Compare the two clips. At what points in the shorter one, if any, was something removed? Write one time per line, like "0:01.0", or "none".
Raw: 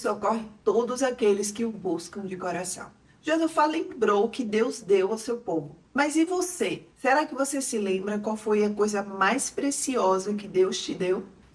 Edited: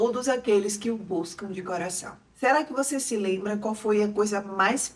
0:02.2